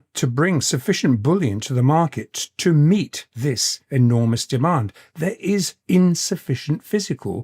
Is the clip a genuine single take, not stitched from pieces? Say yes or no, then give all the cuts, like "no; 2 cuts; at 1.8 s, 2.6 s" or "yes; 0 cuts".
no; 2 cuts; at 3.5 s, 5.8 s